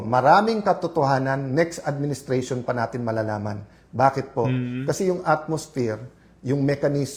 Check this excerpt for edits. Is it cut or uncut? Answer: uncut